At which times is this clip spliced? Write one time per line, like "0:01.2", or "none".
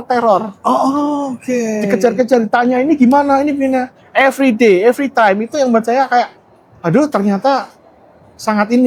none